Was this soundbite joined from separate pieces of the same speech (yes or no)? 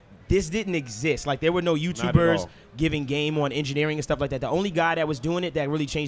no